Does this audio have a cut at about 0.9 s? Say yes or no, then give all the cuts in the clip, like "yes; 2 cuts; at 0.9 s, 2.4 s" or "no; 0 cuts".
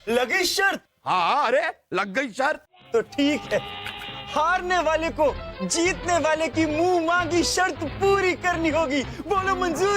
yes; 1 cut; at 0.9 s